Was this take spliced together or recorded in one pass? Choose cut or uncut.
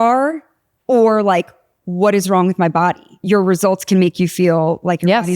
cut